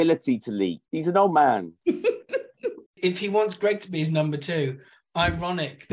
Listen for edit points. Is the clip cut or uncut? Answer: cut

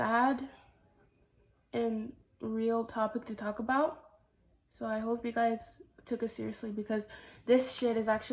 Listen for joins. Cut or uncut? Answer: uncut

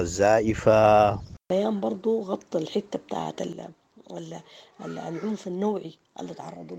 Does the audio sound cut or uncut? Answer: cut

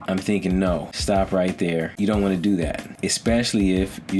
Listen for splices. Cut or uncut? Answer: cut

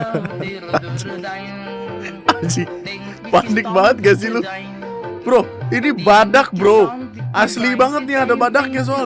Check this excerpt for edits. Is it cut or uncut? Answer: uncut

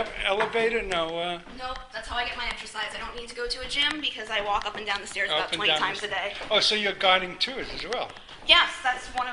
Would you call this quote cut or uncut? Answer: uncut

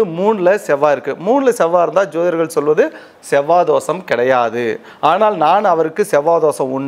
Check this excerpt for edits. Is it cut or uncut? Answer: uncut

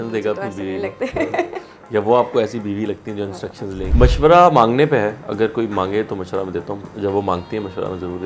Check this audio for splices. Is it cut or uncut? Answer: cut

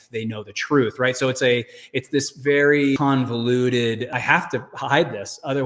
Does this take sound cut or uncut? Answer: cut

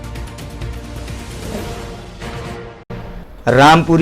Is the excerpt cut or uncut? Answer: cut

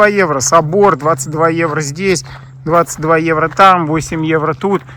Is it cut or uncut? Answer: uncut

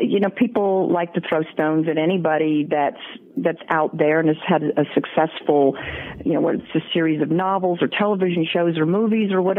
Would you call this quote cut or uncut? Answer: uncut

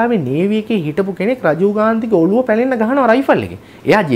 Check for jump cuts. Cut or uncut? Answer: uncut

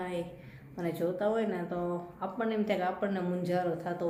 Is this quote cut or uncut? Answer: uncut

